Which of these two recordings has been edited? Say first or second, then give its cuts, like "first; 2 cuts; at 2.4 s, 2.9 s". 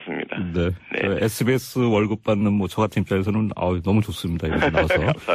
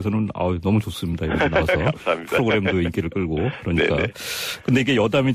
first; 1 cut; at 1.9 s